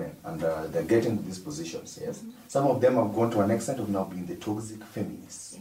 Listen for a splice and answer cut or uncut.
uncut